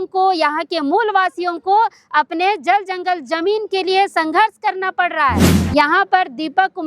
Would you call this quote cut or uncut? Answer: cut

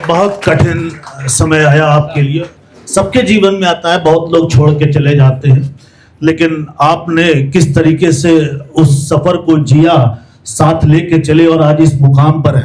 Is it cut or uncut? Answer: uncut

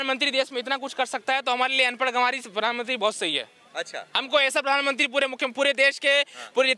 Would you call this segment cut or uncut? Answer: uncut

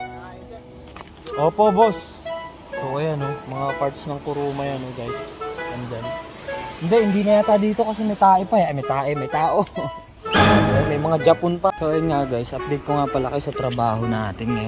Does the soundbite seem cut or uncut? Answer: cut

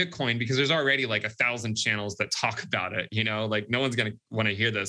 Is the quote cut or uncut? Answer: uncut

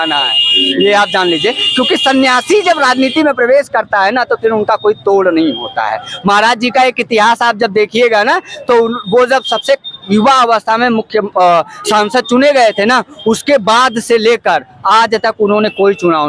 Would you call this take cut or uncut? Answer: uncut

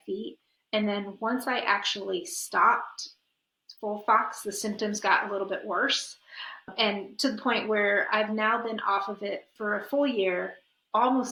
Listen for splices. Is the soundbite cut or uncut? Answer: uncut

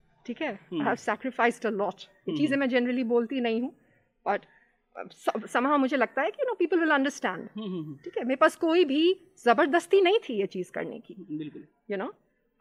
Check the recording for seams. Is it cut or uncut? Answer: uncut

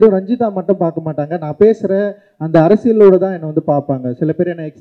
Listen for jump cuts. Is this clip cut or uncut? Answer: uncut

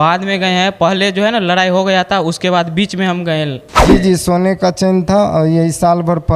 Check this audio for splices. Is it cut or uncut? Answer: cut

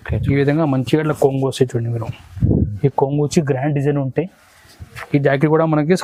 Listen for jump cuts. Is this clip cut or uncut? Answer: uncut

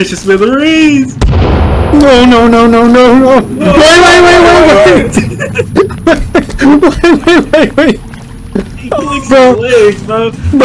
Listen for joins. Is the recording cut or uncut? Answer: uncut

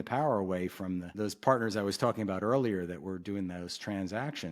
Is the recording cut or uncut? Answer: cut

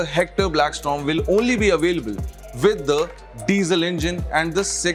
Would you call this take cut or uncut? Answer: uncut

